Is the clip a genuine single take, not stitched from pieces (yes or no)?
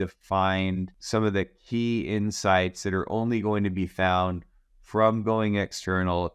no